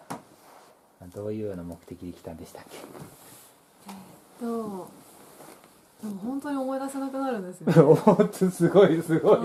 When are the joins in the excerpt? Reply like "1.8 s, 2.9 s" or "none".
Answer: none